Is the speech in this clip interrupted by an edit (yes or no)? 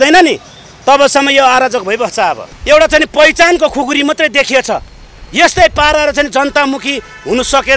yes